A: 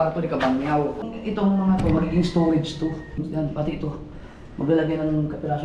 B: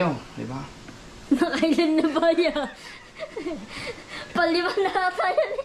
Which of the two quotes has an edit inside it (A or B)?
A